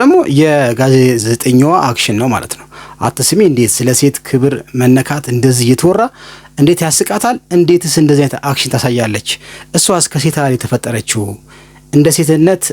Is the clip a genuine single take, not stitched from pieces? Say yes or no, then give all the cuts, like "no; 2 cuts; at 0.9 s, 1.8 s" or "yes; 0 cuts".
yes; 0 cuts